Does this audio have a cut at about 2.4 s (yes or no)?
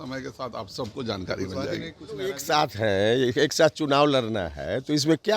yes